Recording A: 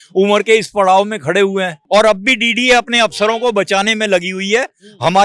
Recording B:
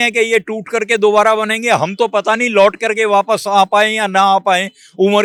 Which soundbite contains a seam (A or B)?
A